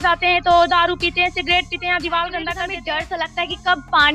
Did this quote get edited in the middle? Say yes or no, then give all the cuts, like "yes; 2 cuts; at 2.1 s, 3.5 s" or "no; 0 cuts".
yes; 1 cut; at 2.8 s